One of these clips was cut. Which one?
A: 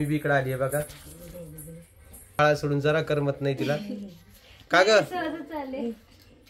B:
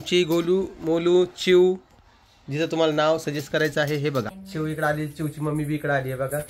B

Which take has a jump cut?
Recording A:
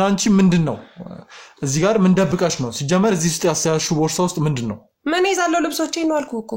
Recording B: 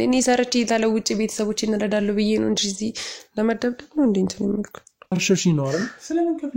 B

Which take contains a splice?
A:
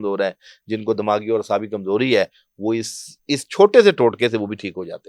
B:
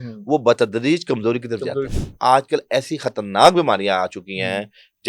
B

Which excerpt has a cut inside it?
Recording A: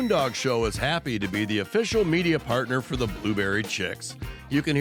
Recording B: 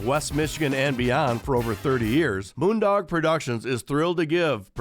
B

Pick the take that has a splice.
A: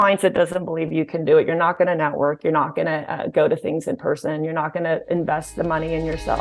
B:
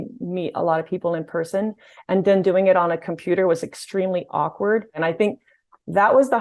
B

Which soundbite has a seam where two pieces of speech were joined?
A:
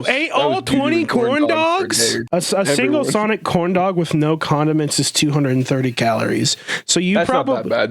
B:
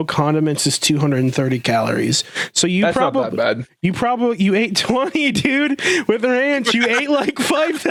A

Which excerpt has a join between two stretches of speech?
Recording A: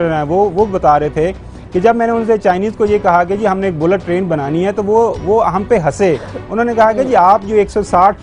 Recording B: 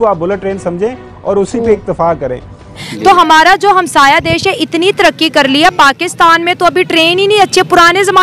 B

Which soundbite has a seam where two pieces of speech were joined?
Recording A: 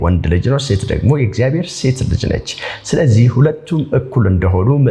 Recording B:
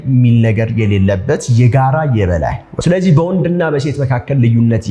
B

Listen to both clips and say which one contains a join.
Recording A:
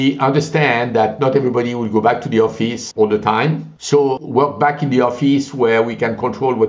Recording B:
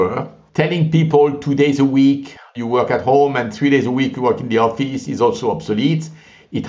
A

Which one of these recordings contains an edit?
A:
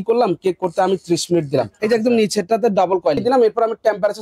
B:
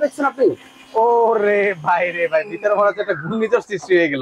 A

